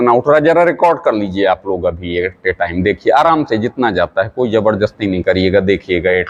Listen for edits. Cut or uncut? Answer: uncut